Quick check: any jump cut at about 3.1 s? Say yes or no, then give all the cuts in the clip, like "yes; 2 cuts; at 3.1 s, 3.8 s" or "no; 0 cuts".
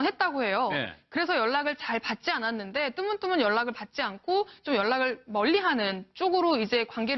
yes; 1 cut; at 3.1 s